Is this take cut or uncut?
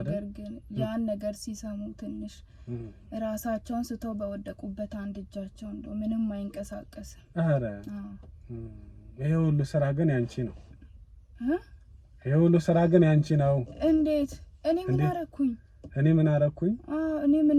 uncut